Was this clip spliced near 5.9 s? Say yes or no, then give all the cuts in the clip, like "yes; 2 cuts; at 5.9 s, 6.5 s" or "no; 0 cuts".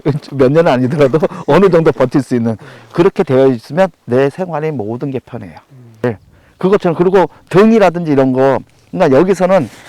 yes; 1 cut; at 5.9 s